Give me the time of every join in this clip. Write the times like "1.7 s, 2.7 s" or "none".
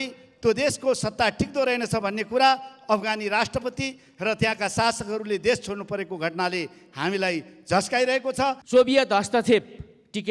8.6 s

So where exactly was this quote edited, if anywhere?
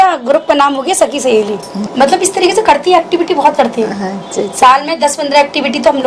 1.9 s

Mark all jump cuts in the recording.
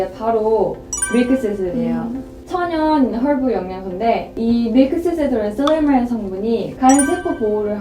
2.3 s

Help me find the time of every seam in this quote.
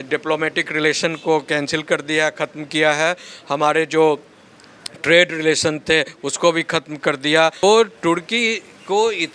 7.6 s

